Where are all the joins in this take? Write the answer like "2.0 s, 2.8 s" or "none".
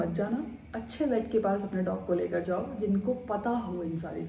none